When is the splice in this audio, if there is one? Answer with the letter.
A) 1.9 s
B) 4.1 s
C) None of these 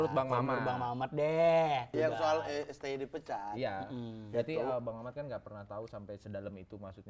A